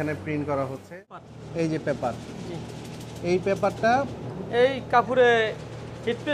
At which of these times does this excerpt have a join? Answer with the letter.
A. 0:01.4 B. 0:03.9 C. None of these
A